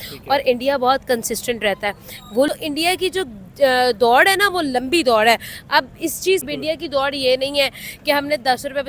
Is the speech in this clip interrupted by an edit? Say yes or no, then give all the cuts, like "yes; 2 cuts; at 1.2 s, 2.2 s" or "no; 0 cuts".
yes; 2 cuts; at 2.5 s, 6.4 s